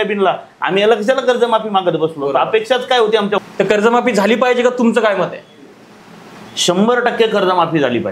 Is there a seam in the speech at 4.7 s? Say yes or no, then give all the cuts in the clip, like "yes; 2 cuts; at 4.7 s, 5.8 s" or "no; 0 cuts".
no; 1 cut; at 3.4 s